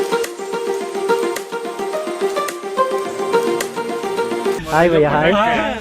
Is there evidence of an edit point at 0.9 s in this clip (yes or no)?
no